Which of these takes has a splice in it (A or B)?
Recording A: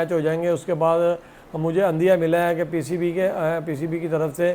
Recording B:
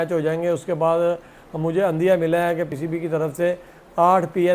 B